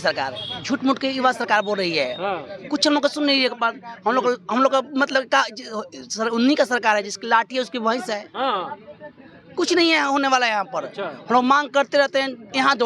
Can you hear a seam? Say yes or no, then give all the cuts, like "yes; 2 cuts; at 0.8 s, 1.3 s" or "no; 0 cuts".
no; 0 cuts